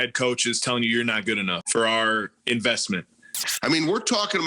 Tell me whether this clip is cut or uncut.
cut